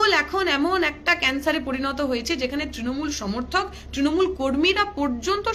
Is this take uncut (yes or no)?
yes